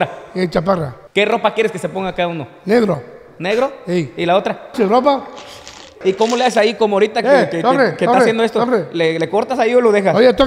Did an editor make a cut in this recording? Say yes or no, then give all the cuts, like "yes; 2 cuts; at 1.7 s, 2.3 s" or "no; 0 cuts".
yes; 2 cuts; at 1.0 s, 6.0 s